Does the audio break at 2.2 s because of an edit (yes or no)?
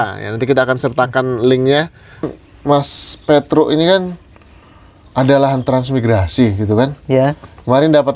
yes